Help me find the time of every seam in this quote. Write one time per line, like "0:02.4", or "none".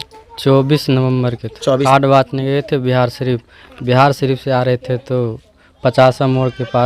0:01.8